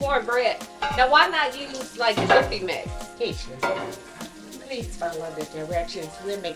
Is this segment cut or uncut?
cut